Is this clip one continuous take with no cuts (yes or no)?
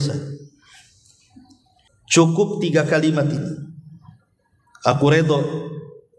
no